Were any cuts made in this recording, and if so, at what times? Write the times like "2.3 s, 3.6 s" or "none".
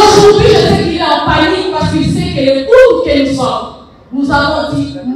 none